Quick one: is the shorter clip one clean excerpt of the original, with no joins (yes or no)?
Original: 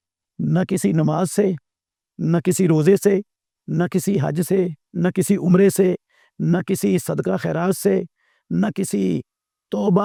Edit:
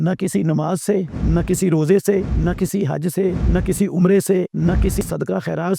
no